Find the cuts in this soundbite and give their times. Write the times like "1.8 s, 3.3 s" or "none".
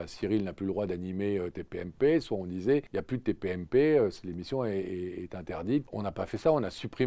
2.9 s, 5.9 s

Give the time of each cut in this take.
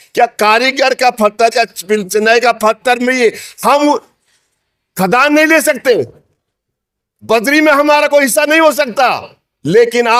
none

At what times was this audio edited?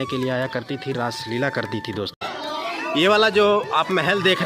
2.3 s

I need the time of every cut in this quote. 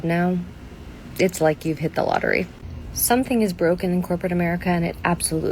2.6 s

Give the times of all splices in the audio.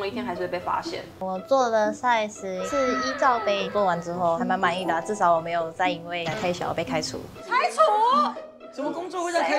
1.1 s

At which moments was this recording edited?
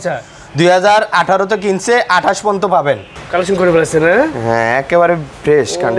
3.1 s

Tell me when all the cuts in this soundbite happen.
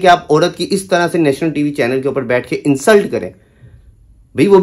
none

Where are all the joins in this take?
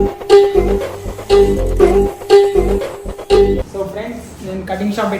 3.7 s

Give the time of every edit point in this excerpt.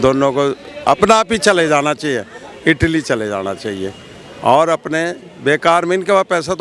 none

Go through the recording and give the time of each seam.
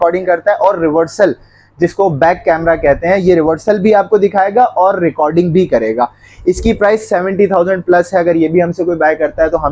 none

